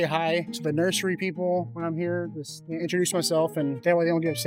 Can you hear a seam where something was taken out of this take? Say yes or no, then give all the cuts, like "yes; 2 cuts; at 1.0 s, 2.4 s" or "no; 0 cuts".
no; 0 cuts